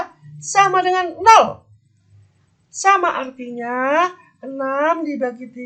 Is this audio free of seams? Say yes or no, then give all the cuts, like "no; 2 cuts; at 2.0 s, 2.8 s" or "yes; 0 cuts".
yes; 0 cuts